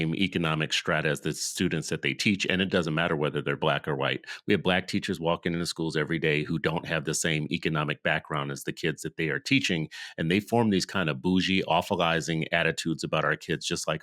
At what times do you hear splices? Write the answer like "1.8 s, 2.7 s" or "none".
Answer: none

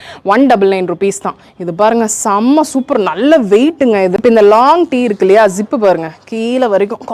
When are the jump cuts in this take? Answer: 4.1 s

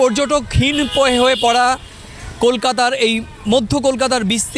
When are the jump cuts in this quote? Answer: none

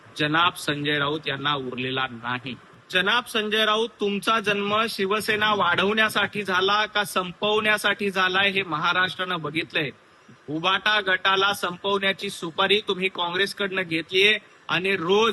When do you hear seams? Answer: 2.6 s

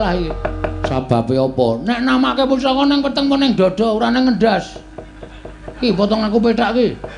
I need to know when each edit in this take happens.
0.9 s

